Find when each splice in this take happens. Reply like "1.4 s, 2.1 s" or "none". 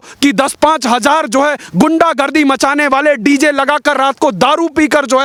none